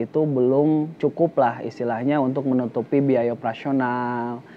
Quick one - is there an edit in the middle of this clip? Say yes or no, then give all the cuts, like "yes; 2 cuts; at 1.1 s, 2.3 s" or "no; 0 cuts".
yes; 1 cut; at 0.9 s